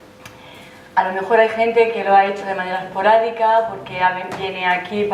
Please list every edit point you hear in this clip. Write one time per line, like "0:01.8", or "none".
none